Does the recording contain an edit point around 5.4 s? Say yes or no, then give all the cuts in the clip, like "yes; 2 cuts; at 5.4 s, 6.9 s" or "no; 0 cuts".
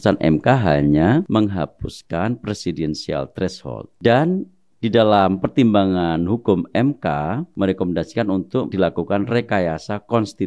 no; 4 cuts; at 1.3 s, 3.9 s, 7.5 s, 8.7 s